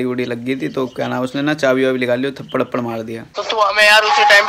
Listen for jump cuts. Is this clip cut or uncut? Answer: cut